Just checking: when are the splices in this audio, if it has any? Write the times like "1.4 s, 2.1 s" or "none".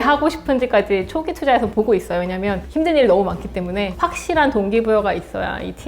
3.9 s